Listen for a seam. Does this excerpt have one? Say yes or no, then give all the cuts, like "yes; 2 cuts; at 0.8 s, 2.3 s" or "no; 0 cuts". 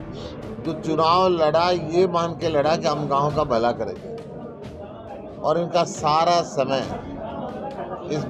no; 0 cuts